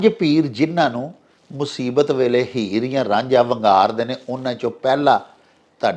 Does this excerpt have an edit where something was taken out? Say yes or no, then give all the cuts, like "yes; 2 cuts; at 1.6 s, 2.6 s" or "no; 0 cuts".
no; 0 cuts